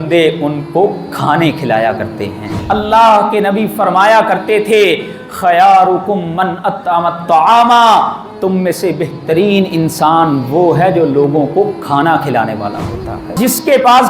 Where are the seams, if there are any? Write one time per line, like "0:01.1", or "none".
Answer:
0:02.5
0:13.4